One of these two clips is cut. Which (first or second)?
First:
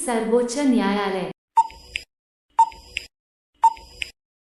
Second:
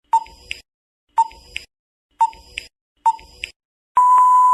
first